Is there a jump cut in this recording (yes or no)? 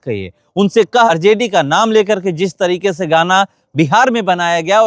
yes